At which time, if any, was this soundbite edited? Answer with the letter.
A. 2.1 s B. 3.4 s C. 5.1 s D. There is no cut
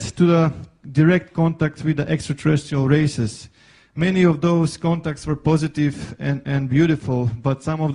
A